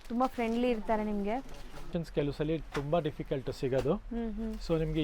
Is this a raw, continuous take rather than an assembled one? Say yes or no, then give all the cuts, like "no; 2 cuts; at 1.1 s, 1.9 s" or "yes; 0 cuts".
no; 1 cut; at 1.9 s